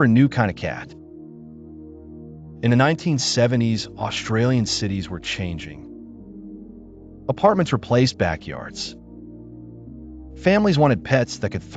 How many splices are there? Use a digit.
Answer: 2